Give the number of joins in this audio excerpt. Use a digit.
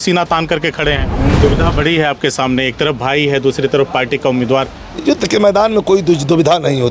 1